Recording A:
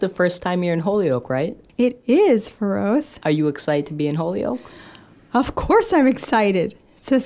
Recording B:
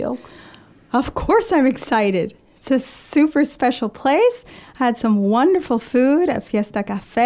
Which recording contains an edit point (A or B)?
A